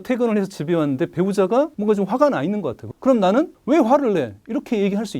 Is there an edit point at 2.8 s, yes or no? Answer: yes